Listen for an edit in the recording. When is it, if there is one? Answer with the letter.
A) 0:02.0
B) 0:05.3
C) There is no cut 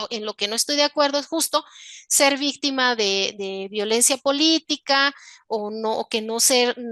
C